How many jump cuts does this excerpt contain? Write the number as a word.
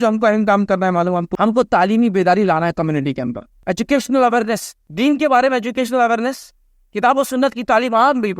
three